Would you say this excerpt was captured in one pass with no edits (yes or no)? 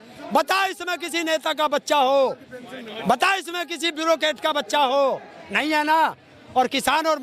yes